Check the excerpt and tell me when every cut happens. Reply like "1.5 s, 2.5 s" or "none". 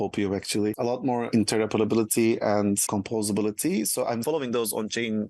1.0 s, 2.8 s, 4.2 s